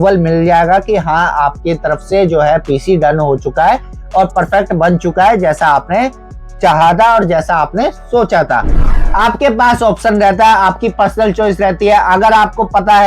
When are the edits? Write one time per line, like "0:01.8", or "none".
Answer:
0:08.9